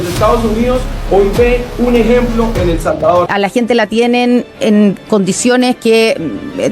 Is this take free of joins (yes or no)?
no